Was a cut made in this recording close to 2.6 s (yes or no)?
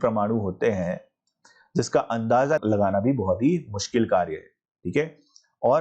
yes